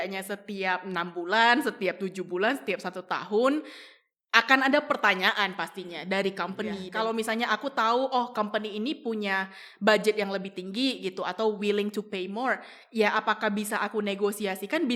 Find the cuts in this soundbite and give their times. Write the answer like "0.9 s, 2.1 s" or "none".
6.8 s